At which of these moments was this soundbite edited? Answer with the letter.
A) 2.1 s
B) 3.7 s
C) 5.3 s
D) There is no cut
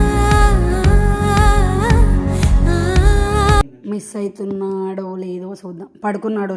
B